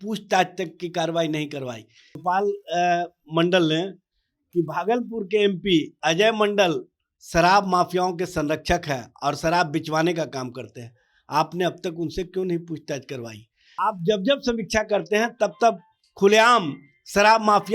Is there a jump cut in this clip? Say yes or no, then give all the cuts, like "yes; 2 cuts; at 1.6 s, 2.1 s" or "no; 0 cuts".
yes; 2 cuts; at 2.2 s, 13.8 s